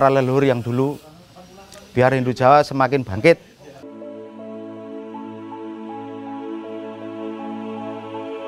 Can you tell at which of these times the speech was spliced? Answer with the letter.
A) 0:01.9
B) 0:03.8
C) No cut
C